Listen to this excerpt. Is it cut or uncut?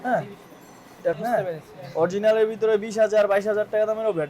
cut